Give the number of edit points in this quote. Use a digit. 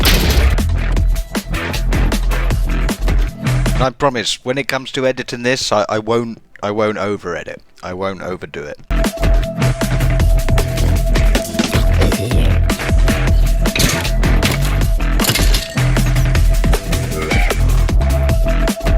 1